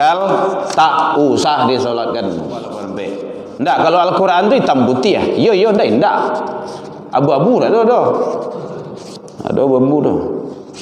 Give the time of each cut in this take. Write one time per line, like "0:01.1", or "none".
0:02.9